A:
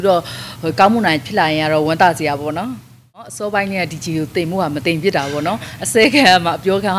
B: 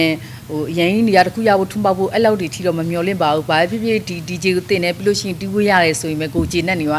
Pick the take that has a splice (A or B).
A